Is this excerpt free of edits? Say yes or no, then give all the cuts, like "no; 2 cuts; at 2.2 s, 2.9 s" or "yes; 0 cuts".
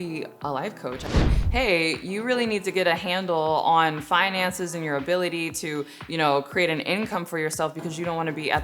no; 1 cut; at 1.4 s